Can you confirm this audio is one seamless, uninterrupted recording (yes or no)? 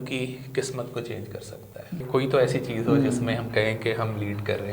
no